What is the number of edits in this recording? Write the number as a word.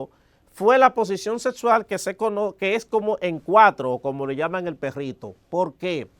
zero